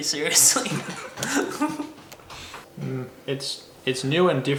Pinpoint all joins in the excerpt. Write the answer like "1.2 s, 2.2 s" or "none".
none